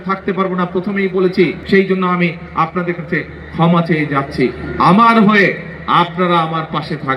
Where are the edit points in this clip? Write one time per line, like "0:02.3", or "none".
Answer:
0:01.6